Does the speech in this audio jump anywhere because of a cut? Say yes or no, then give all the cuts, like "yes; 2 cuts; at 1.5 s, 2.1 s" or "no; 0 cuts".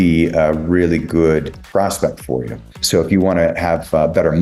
yes; 2 cuts; at 1.6 s, 2.8 s